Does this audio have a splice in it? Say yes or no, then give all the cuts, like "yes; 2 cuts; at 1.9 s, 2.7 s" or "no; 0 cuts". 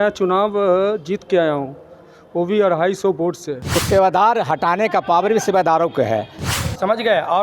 yes; 2 cuts; at 3.7 s, 6.4 s